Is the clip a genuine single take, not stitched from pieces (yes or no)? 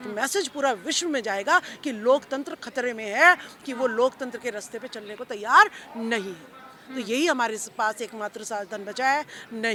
yes